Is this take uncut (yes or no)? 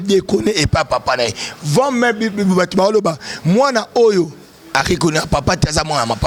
yes